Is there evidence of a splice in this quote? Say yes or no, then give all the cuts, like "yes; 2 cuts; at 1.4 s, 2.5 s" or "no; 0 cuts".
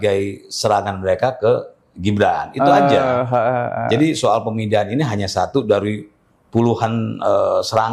no; 0 cuts